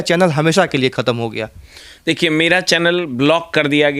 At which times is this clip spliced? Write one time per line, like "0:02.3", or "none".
none